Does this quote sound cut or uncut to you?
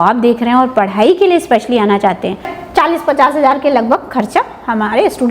cut